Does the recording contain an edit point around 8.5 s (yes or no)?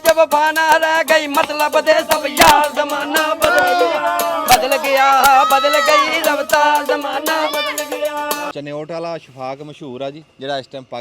yes